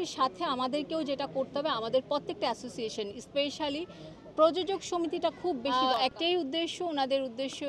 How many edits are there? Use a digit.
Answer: 1